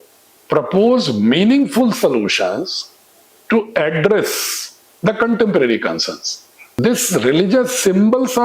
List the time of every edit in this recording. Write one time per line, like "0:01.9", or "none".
0:06.7

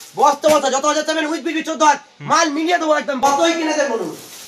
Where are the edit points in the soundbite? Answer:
0:03.2

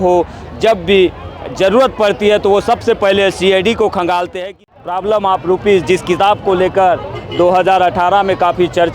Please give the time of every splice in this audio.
0:04.4

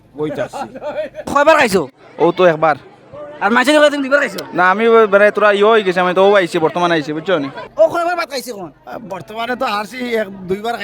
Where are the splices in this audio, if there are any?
0:01.3
0:07.6

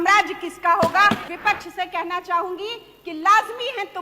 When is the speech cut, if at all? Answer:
0:01.2

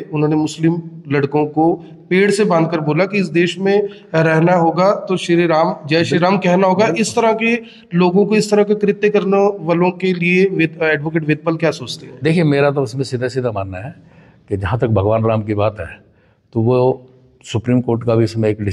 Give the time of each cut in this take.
none

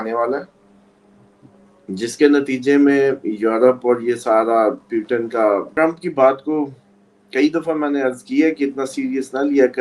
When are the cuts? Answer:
0:05.7

